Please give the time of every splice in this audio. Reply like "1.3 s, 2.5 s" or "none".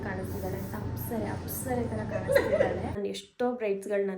3.0 s